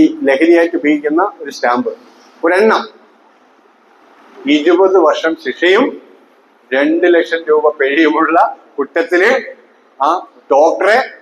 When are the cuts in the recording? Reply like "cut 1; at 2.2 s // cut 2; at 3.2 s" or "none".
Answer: none